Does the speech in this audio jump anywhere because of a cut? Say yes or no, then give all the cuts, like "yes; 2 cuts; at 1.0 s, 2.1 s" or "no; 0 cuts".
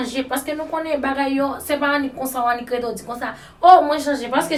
no; 0 cuts